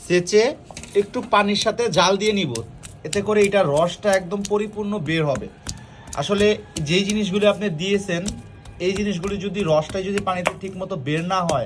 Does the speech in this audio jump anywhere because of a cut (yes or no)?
no